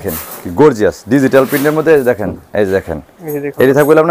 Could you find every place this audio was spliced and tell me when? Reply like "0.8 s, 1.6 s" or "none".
none